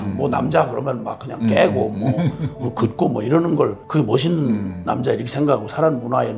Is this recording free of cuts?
no; 1 cut; at 3.8 s

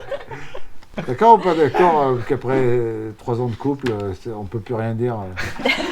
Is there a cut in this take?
yes; 1 cut; at 0.9 s

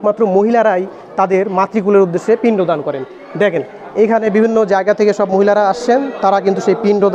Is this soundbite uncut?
yes; 0 cuts

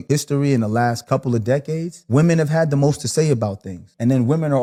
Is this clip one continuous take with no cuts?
yes; 0 cuts

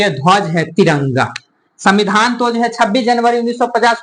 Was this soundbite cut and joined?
yes; 1 cut; at 1.7 s

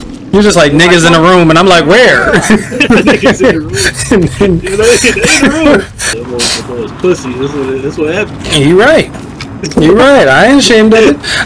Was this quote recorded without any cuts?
no; 1 cut; at 6.0 s

